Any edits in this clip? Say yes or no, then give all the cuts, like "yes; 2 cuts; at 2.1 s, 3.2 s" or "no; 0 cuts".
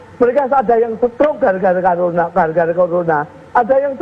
no; 0 cuts